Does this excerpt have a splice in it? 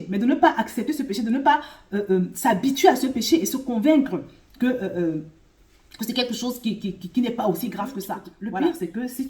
yes; 1 cut; at 8.2 s

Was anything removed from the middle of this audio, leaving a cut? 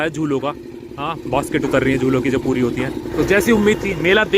yes; 1 cut; at 3.1 s

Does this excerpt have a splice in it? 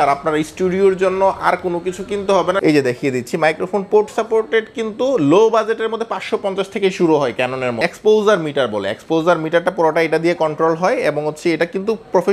yes; 2 cuts; at 2.6 s, 7.8 s

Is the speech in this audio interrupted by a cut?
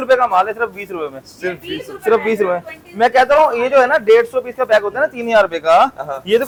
no; 0 cuts

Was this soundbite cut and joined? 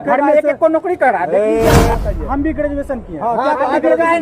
yes; 1 cut; at 1.9 s

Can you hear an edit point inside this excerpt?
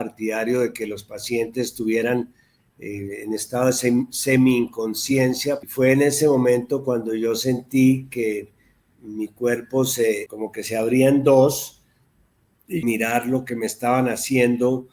yes; 3 cuts; at 5.6 s, 10.3 s, 12.8 s

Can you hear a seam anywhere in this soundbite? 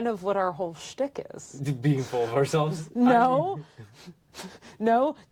no; 0 cuts

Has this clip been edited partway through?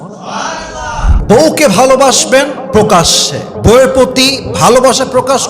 yes; 1 cut; at 1.1 s

